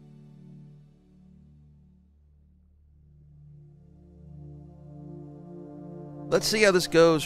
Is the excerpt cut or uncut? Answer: uncut